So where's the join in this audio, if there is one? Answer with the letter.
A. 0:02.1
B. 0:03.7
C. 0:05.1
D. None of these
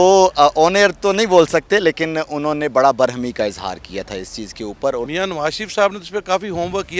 C